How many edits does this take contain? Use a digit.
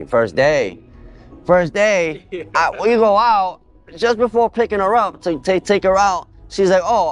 0